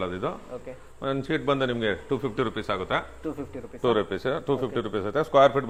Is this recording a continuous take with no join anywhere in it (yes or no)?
yes